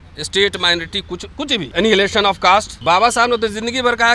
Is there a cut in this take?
yes; 2 cuts; at 1.7 s, 2.7 s

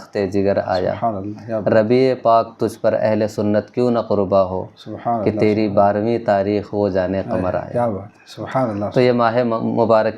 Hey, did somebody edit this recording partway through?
no; 0 cuts

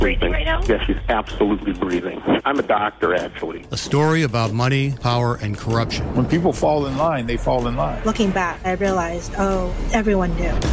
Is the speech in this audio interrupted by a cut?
no; 0 cuts

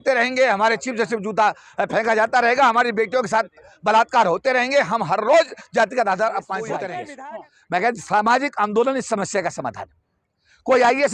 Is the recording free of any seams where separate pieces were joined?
no; 1 cut; at 7.0 s

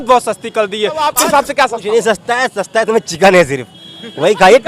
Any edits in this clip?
yes; 1 cut; at 1.1 s

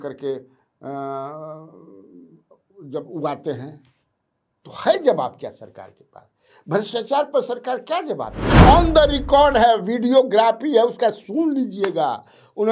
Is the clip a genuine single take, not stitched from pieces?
no; 1 cut; at 8.4 s

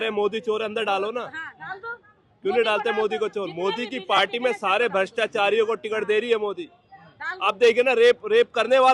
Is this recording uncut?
yes; 0 cuts

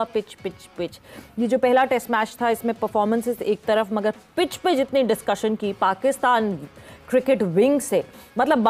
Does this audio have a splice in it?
no; 0 cuts

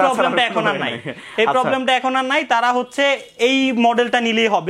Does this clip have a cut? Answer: no; 0 cuts

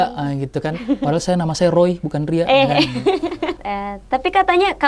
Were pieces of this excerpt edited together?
yes; 1 cut; at 3.6 s

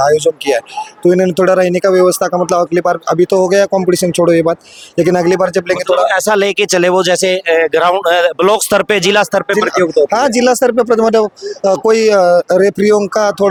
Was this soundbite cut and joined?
no; 0 cuts

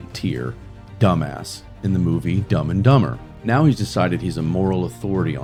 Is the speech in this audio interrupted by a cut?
no; 0 cuts

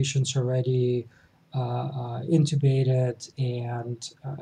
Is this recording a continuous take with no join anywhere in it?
yes; 0 cuts

